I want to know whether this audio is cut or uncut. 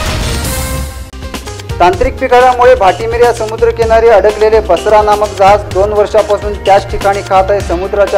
cut